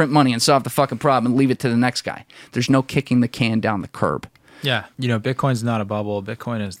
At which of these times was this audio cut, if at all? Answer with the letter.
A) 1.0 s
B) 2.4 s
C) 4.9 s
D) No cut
C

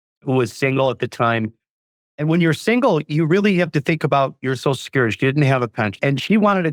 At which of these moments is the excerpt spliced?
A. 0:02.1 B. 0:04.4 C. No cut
C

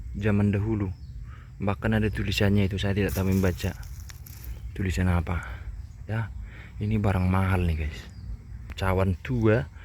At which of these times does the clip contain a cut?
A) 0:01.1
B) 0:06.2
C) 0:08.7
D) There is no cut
C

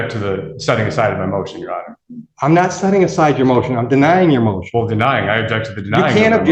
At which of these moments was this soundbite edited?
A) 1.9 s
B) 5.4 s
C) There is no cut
C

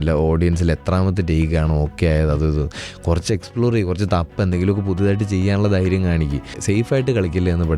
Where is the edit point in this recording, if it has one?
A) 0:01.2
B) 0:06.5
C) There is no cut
B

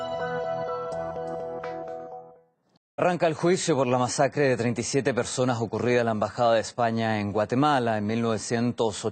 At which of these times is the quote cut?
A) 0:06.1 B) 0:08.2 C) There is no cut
A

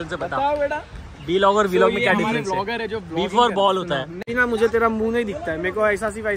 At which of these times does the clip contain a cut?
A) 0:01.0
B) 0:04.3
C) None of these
B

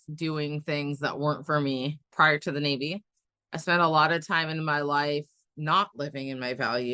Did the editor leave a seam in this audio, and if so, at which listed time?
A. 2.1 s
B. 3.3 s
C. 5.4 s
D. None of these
A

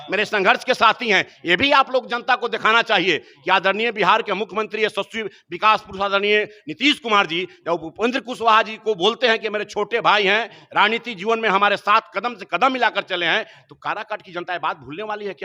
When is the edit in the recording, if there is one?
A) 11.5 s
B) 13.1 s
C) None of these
C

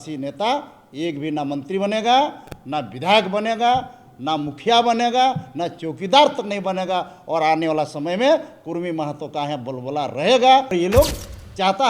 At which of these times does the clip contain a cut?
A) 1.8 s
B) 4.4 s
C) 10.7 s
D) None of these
C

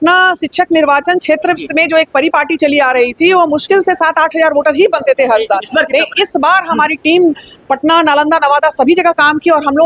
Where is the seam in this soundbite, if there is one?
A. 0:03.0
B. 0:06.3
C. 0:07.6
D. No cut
D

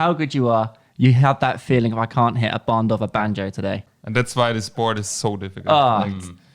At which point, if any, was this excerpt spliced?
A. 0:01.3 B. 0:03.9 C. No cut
B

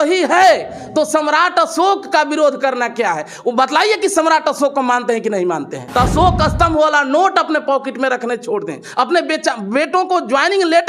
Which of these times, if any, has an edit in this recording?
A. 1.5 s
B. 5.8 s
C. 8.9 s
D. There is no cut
B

